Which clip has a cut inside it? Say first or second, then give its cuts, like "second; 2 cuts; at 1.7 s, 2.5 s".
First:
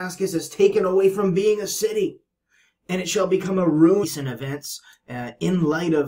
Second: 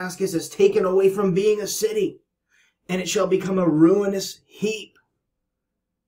second; 1 cut; at 4.0 s